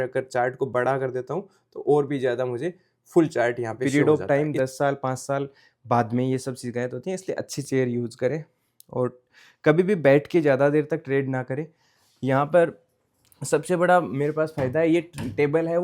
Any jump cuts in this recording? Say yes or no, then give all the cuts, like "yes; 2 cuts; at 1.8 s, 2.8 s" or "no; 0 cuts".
yes; 1 cut; at 3.8 s